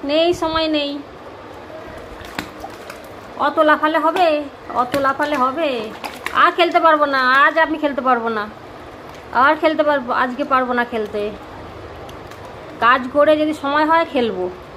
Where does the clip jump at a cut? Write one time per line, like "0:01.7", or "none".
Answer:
none